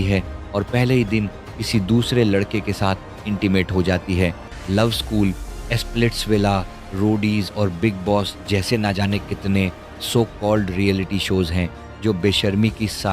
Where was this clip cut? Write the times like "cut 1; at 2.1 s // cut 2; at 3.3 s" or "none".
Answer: cut 1; at 4.5 s